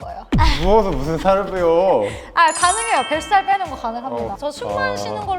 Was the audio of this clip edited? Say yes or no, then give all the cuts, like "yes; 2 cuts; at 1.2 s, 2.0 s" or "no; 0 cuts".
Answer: yes; 1 cut; at 4.4 s